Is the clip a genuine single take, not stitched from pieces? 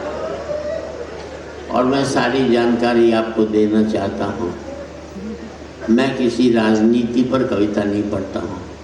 yes; 0 cuts

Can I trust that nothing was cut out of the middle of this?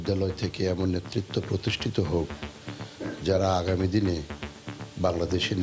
yes; 0 cuts

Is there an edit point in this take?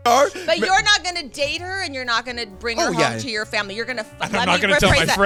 no; 0 cuts

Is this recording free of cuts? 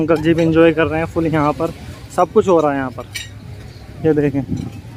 yes; 0 cuts

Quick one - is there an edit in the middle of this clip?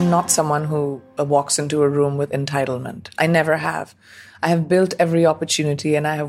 no; 0 cuts

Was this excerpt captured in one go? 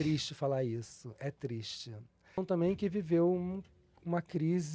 no; 1 cut; at 2.4 s

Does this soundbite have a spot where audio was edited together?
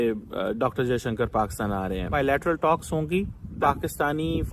yes; 2 cuts; at 2.1 s, 3.6 s

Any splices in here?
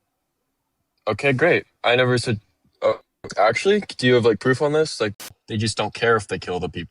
yes; 1 cut; at 5.1 s

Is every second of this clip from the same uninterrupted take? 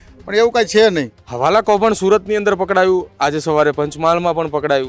no; 1 cut; at 1.2 s

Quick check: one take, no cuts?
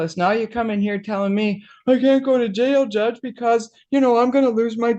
yes; 0 cuts

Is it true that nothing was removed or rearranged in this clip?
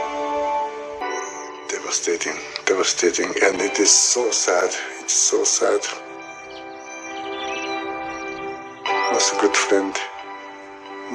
no; 1 cut; at 1.0 s

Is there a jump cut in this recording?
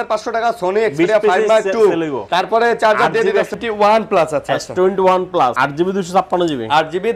yes; 3 cuts; at 2.2 s, 3.5 s, 5.5 s

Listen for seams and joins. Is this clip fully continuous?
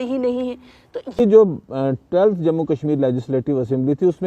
no; 1 cut; at 1.2 s

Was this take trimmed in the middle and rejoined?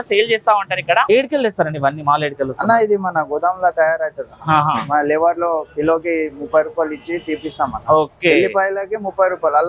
yes; 1 cut; at 1.1 s

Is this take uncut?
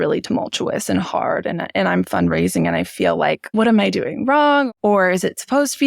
no; 2 cuts; at 3.5 s, 4.7 s

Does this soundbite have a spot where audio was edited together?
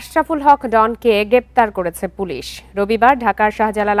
no; 0 cuts

